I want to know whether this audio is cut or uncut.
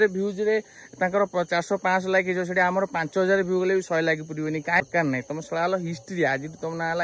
cut